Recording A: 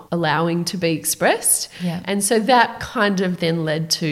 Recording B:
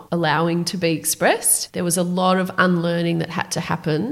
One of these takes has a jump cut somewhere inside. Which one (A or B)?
B